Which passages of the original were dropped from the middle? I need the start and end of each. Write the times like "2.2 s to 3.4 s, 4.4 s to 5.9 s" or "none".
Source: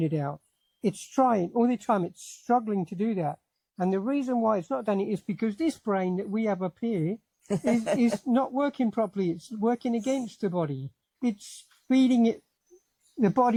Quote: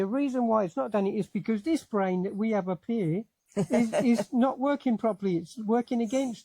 none